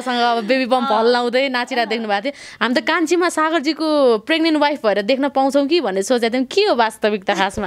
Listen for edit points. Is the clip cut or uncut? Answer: uncut